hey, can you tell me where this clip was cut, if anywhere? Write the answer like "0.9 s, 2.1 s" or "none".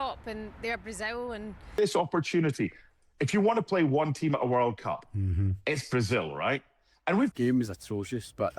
1.7 s, 7.3 s